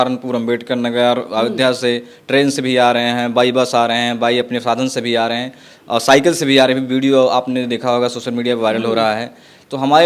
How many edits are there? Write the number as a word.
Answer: zero